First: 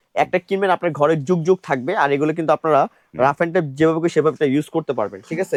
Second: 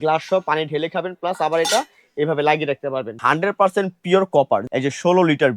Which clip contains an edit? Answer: second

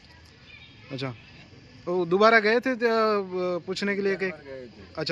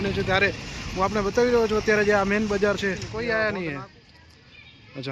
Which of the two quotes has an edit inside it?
second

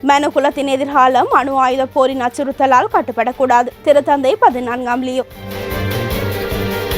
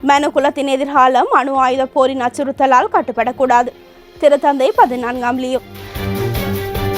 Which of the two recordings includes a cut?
first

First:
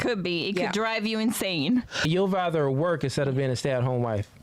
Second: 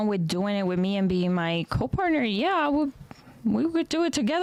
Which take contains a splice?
first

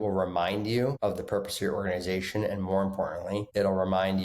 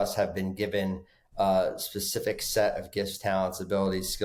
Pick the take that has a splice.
first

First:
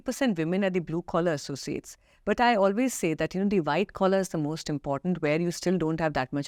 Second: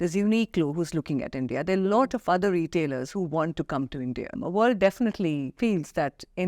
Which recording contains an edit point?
second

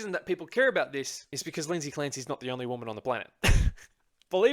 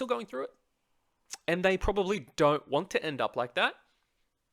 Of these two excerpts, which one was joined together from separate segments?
first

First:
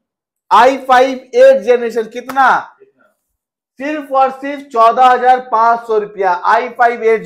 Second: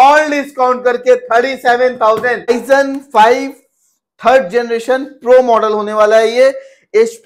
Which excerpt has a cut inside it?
second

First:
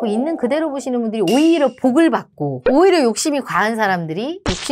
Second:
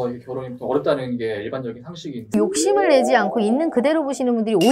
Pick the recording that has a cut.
second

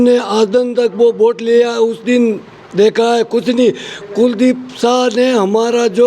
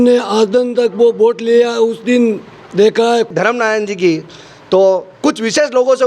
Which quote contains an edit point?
second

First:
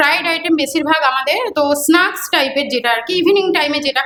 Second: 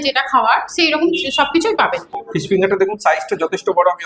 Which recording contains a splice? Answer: second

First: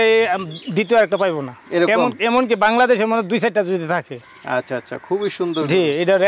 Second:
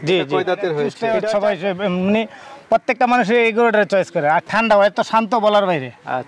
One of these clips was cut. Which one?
second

